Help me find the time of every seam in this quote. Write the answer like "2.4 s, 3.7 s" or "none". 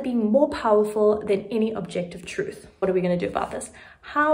2.6 s